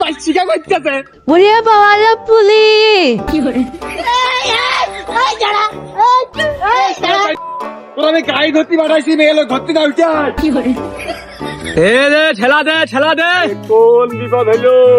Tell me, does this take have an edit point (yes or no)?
yes